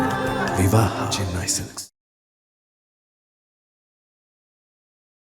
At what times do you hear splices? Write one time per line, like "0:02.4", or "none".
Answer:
none